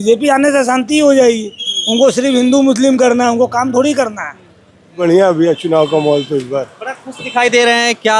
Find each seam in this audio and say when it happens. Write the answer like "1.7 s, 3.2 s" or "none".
4.9 s